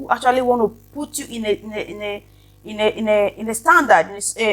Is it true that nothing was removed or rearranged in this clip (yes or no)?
yes